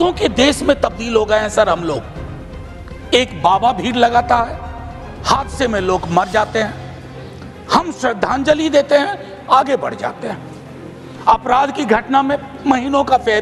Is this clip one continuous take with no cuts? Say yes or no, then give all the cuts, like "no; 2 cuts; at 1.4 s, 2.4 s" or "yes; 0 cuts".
yes; 0 cuts